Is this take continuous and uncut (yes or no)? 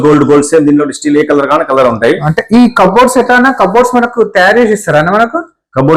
yes